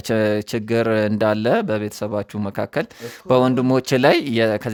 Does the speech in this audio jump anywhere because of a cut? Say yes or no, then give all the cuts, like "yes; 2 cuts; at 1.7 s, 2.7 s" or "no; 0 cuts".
no; 0 cuts